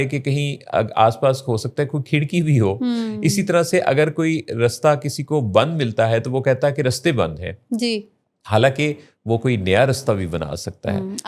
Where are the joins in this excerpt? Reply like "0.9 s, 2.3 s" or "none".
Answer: none